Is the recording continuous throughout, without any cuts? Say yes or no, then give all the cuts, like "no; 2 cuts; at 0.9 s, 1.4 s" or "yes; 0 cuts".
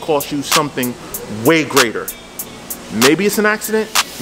yes; 0 cuts